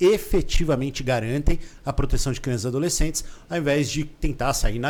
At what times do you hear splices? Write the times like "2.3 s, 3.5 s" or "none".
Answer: none